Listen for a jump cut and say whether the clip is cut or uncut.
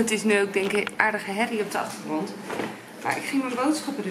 uncut